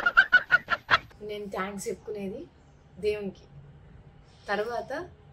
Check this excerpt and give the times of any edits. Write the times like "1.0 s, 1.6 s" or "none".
1.1 s